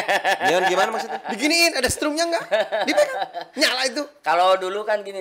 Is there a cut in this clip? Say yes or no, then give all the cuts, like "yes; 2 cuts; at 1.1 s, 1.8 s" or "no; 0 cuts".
no; 0 cuts